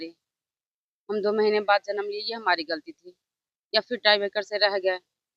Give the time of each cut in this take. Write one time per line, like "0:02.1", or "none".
none